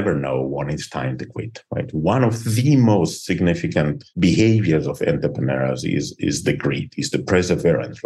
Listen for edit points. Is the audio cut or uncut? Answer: uncut